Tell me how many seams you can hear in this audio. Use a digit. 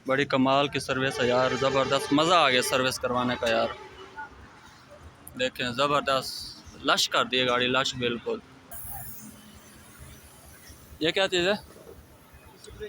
1